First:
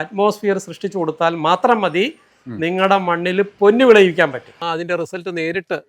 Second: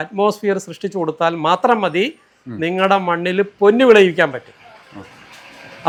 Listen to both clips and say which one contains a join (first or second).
first